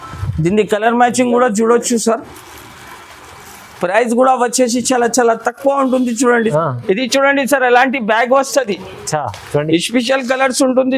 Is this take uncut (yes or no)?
no